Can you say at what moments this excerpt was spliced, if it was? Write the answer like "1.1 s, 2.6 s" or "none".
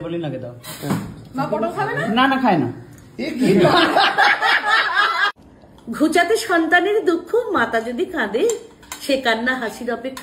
5.3 s